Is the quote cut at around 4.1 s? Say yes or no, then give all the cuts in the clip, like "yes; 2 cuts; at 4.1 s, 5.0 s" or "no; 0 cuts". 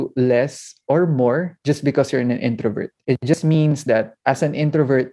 yes; 2 cuts; at 2.9 s, 4.1 s